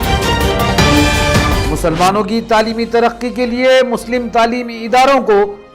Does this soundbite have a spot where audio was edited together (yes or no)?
yes